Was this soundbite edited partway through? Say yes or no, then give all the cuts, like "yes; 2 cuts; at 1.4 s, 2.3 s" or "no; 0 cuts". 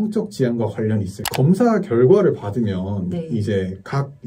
yes; 1 cut; at 1.2 s